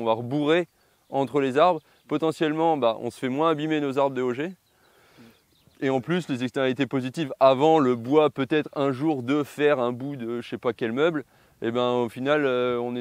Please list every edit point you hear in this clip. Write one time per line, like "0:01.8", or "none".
none